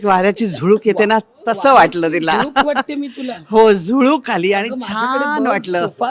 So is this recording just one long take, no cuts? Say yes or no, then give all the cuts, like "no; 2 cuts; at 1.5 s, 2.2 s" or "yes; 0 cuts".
yes; 0 cuts